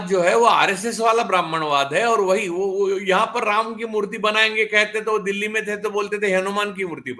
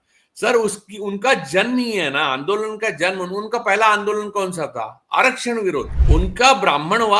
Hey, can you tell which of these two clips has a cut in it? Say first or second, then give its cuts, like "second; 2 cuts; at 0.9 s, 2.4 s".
second; 1 cut; at 6.0 s